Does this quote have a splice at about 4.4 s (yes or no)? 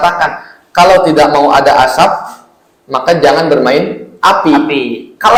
no